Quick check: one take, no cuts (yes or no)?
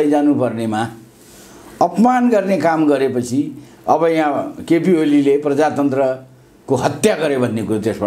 yes